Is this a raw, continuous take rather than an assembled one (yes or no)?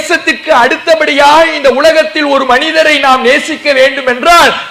yes